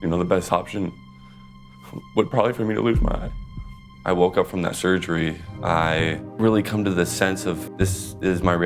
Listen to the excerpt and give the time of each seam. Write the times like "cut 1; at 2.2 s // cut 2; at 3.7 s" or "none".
cut 1; at 3.9 s // cut 2; at 5.5 s // cut 3; at 6.3 s // cut 4; at 7.7 s